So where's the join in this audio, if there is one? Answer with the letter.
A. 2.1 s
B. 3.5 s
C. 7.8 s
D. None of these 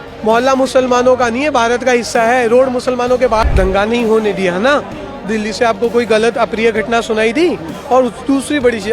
B